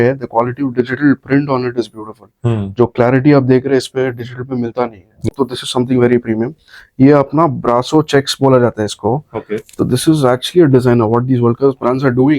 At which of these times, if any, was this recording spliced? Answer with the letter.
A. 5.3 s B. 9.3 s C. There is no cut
A